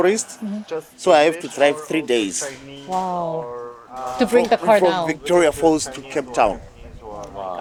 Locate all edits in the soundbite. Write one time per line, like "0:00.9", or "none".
none